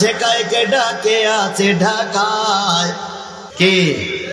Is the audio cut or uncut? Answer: cut